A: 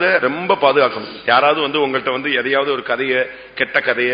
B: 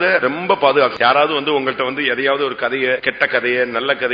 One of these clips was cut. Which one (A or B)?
B